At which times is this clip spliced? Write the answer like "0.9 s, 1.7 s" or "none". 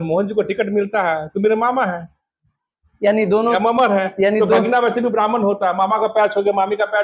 none